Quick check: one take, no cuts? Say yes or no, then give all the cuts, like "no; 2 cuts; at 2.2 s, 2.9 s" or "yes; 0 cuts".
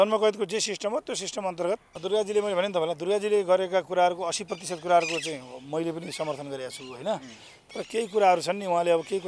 no; 1 cut; at 1.9 s